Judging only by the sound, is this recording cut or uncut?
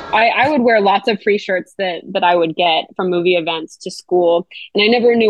uncut